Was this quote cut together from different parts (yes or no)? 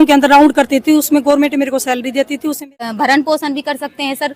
yes